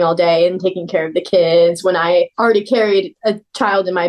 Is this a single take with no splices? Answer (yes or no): no